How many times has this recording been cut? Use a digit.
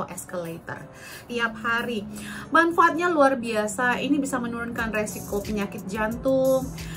1